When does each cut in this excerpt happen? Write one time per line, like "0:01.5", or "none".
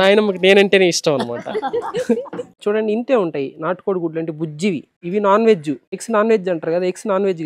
0:02.5
0:04.9
0:05.9